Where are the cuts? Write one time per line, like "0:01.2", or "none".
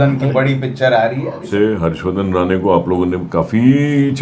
0:01.4